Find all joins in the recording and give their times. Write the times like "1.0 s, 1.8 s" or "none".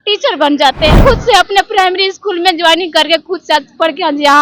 1.0 s